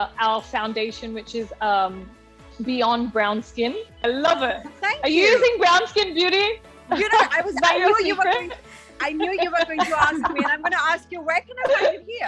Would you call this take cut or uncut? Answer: cut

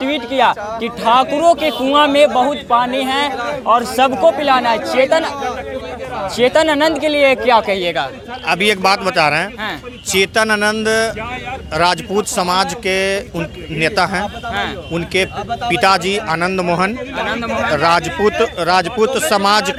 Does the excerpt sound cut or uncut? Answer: uncut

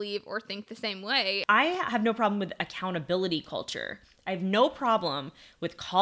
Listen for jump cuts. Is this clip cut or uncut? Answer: cut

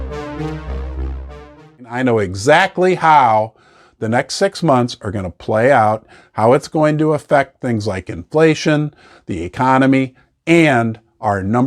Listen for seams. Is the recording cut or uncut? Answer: cut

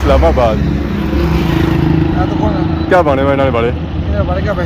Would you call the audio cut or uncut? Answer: uncut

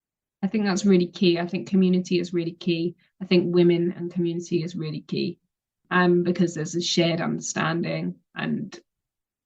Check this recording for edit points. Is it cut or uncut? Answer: cut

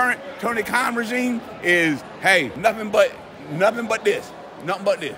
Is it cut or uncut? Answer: cut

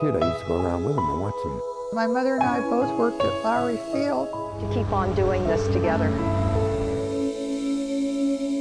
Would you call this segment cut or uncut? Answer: uncut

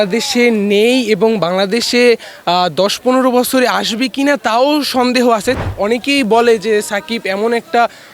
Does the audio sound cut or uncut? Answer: cut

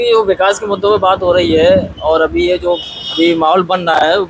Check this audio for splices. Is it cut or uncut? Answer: uncut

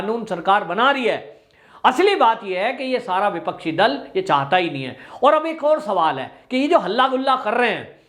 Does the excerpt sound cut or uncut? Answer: uncut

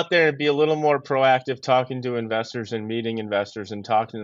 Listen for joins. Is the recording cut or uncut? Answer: uncut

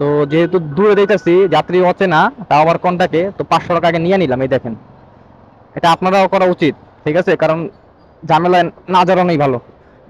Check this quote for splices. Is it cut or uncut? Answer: uncut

